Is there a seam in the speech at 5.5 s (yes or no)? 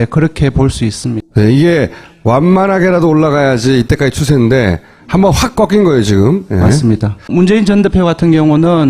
no